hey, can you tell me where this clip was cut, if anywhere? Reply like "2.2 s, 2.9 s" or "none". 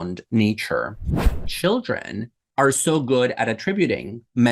1.4 s